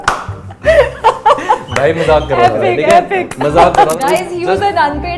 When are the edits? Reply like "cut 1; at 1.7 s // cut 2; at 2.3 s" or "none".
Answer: cut 1; at 3.9 s